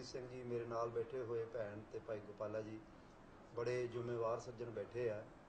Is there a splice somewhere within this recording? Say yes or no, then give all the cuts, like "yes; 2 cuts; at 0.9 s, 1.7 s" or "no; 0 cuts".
yes; 1 cut; at 1.5 s